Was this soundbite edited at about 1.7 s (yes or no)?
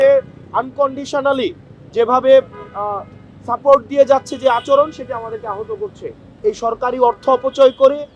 no